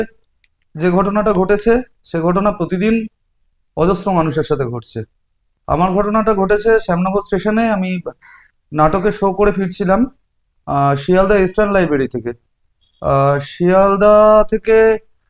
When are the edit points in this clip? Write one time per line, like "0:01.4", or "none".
none